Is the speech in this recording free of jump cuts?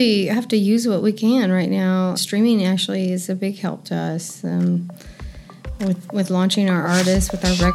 no; 1 cut; at 2.2 s

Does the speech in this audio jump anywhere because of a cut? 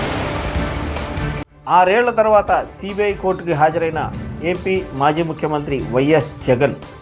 yes; 1 cut; at 1.4 s

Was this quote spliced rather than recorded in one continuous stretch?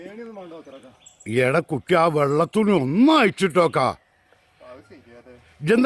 no; 0 cuts

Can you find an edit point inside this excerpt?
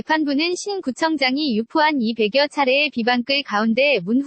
yes; 1 cut; at 0.9 s

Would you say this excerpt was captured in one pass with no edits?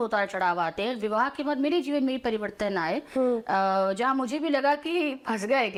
yes; 0 cuts

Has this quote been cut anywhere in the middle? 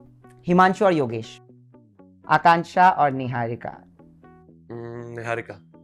yes; 1 cut; at 1.6 s

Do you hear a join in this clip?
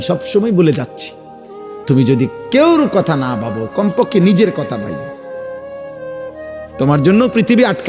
yes; 2 cuts; at 4.9 s, 6.4 s

